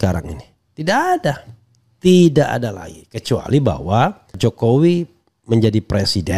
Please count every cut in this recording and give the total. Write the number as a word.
one